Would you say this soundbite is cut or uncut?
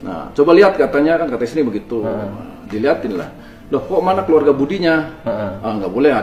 uncut